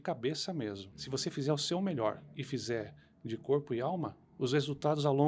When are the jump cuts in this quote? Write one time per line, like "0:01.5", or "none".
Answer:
0:00.9
0:04.2